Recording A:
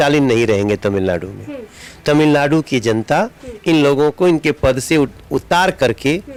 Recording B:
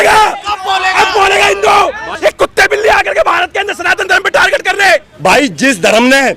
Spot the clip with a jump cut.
B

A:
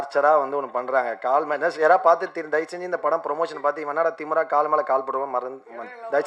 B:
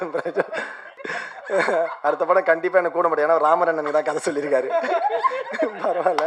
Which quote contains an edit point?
B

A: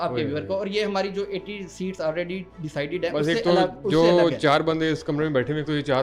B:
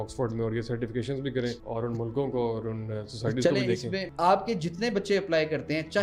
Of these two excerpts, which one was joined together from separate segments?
B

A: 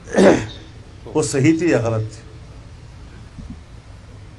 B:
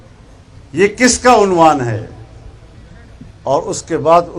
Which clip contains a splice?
A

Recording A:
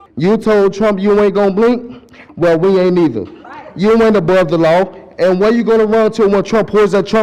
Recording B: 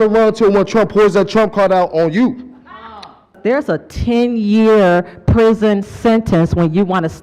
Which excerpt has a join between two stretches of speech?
B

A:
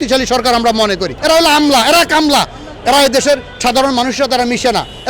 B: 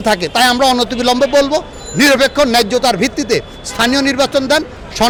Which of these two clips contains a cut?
A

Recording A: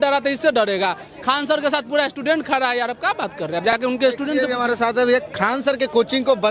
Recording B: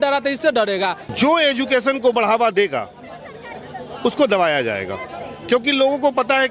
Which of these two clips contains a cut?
B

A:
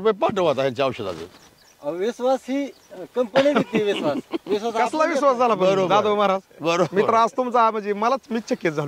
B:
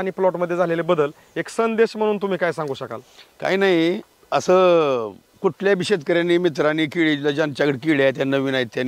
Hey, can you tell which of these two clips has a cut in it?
B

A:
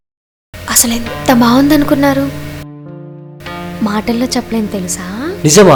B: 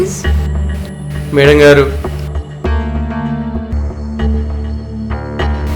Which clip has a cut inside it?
B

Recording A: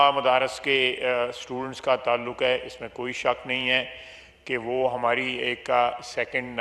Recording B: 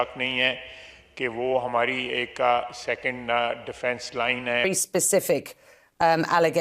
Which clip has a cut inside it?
B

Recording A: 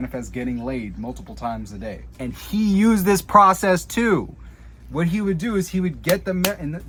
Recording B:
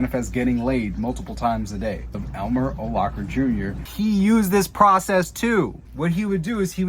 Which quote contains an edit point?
B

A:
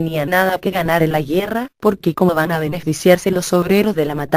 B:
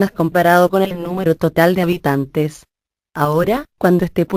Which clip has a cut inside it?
A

